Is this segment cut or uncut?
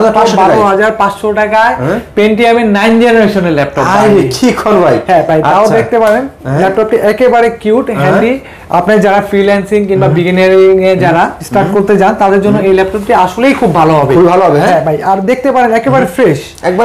uncut